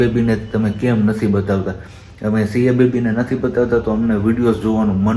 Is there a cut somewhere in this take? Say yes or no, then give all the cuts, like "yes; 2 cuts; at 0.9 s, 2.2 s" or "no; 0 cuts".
no; 0 cuts